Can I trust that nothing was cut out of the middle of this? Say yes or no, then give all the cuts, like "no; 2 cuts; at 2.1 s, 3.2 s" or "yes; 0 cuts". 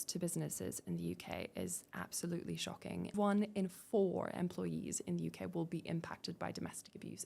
no; 1 cut; at 3.1 s